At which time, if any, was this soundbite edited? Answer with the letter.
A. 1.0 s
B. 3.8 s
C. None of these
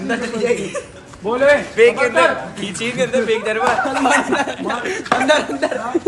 A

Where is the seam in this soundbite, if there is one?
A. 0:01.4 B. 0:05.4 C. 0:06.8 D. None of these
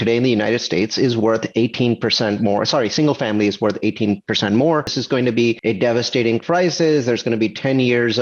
B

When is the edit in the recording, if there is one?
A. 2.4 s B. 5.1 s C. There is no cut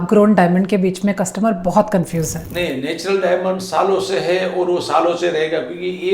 A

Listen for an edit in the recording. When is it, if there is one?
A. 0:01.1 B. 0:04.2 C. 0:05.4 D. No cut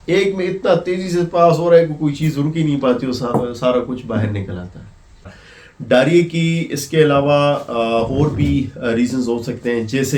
C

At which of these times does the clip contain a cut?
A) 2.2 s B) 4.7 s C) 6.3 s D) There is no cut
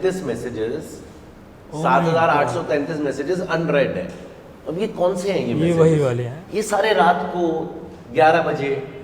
C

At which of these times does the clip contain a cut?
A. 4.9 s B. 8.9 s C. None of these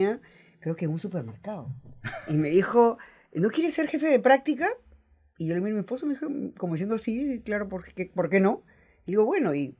C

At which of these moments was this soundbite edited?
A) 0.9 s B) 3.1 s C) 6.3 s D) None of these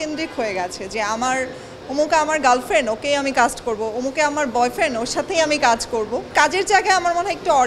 C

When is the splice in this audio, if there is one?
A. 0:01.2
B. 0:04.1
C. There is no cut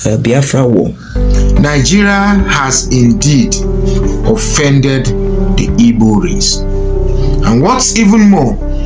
A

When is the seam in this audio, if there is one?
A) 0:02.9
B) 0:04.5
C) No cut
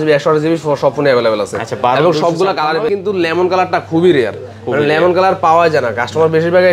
A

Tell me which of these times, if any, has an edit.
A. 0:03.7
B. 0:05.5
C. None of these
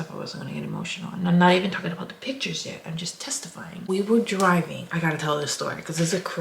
A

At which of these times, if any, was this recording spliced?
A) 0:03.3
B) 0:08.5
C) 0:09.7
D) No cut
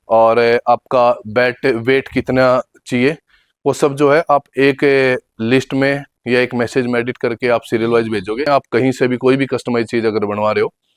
B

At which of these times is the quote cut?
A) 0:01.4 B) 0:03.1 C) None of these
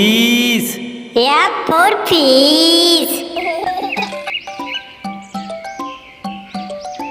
B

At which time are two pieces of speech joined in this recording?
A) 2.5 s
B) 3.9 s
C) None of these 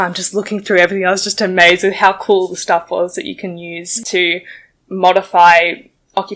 B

